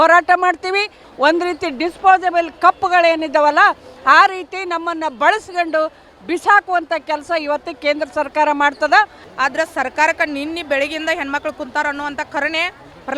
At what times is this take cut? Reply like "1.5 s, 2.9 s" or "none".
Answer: 1.0 s, 9.2 s